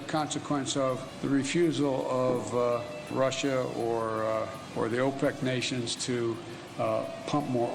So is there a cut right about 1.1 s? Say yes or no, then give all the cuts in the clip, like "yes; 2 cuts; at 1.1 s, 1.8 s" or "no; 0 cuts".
yes; 3 cuts; at 1.1 s, 3.1 s, 4.6 s